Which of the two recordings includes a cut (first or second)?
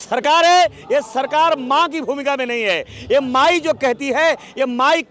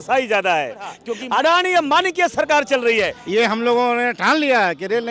second